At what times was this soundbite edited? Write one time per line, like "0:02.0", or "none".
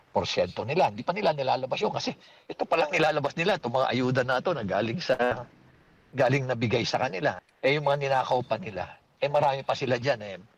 0:07.5
0:09.5

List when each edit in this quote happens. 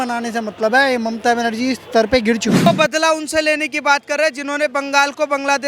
0:02.7

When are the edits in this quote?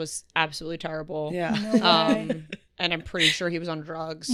none

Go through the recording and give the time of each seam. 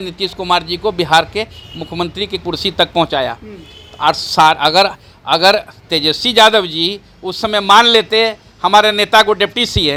none

